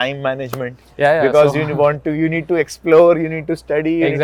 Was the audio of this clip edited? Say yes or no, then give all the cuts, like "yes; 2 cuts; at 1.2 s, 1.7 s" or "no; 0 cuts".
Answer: no; 0 cuts